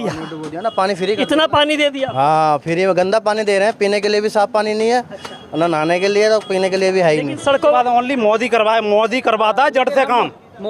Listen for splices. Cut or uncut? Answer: cut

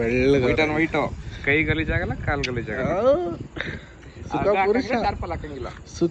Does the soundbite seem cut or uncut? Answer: uncut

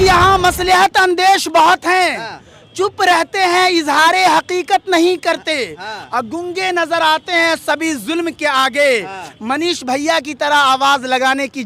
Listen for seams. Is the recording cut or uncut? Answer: uncut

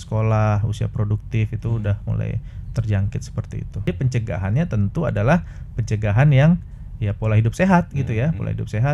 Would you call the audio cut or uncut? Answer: cut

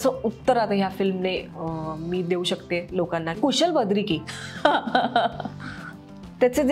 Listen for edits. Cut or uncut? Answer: cut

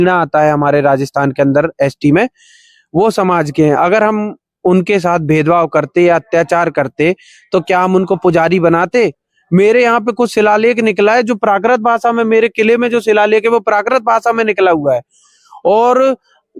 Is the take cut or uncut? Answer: cut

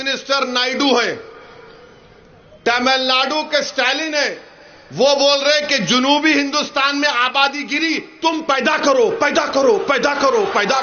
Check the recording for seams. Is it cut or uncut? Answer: uncut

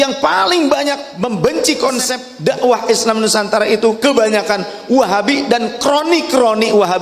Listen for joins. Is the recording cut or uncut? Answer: cut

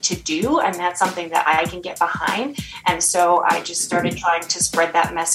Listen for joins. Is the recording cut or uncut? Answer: uncut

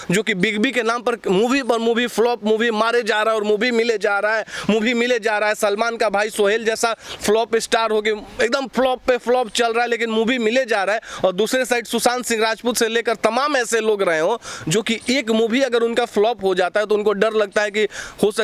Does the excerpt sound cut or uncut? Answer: uncut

